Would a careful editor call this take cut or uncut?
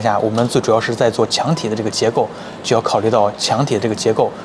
uncut